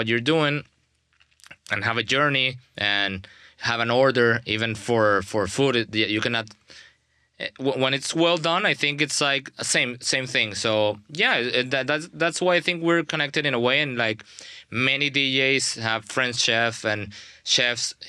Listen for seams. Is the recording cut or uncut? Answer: uncut